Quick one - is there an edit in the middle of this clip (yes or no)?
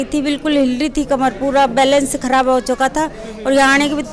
no